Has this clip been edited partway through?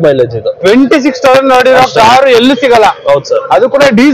no; 0 cuts

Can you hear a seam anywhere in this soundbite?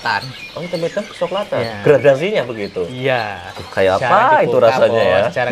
no; 0 cuts

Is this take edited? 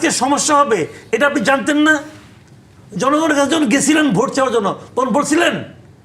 no; 0 cuts

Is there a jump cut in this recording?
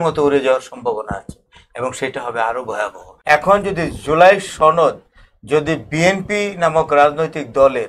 yes; 1 cut; at 3.0 s

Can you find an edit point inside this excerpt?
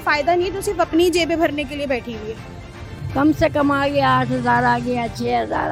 no; 0 cuts

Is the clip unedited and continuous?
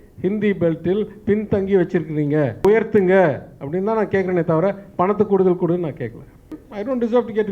no; 2 cuts; at 2.6 s, 6.5 s

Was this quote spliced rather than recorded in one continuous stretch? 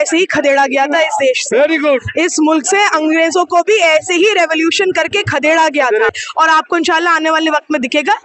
yes; 1 cut; at 6.1 s

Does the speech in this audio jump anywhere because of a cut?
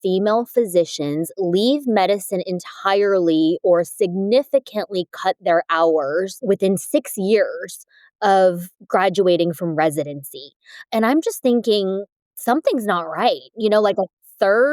yes; 1 cut; at 6.4 s

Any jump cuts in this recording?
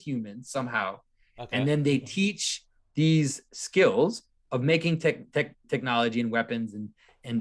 no; 0 cuts

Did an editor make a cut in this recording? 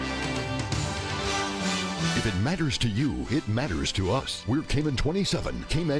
no; 0 cuts

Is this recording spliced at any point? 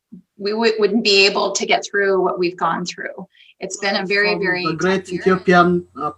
yes; 1 cut; at 4.6 s

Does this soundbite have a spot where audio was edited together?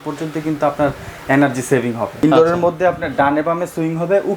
yes; 1 cut; at 2.1 s

